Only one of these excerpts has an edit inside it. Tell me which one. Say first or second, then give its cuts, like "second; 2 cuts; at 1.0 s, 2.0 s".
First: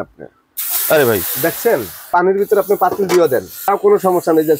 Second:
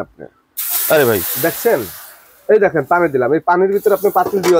first; 2 cuts; at 2.1 s, 3.6 s